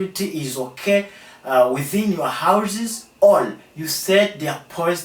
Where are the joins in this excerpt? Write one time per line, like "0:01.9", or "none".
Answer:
none

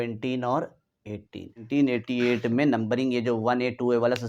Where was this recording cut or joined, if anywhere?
0:01.7

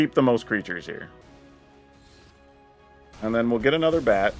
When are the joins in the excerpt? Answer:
0:01.2
0:03.1

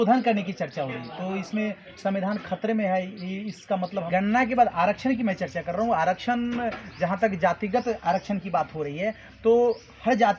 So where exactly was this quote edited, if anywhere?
0:04.0

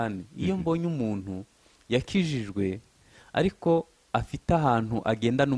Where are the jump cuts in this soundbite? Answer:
none

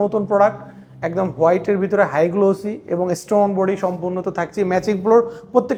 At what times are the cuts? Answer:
none

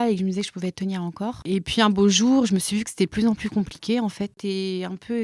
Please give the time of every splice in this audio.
0:01.4
0:04.4

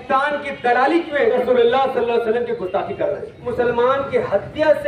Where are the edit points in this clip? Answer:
0:01.3
0:03.4

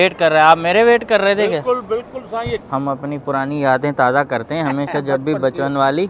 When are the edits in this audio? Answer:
none

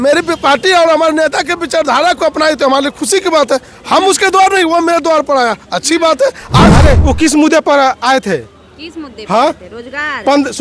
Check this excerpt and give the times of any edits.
0:06.7

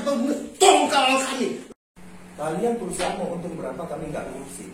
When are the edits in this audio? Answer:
0:01.7

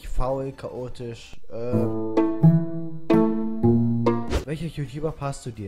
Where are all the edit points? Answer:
0:04.4

